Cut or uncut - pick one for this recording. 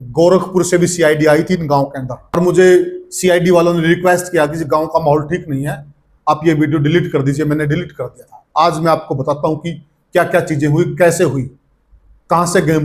cut